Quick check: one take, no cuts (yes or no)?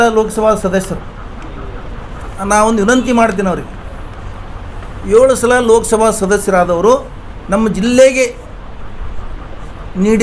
no